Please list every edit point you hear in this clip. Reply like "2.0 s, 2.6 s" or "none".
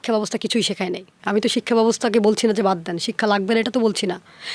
1.1 s